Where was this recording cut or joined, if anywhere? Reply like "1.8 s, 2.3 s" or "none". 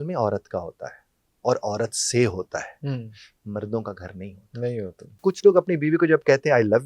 5.2 s